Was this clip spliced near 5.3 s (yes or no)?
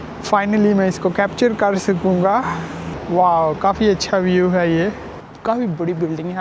yes